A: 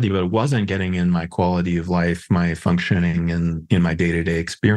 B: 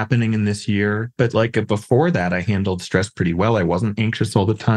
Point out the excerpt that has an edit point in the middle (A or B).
B